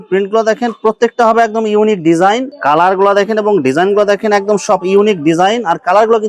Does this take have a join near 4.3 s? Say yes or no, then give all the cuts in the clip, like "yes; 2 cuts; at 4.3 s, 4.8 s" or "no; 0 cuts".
no; 1 cut; at 2.5 s